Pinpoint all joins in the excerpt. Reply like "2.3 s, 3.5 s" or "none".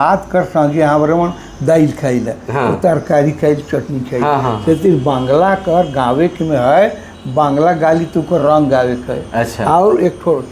none